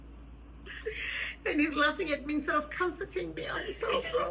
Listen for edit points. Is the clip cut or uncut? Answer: uncut